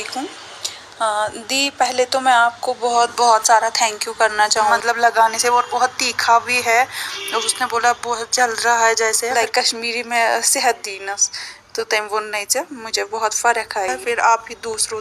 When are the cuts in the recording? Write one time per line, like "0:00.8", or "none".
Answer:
0:04.7
0:09.3
0:14.0